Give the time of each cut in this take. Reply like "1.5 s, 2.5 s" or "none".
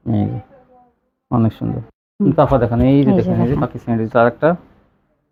none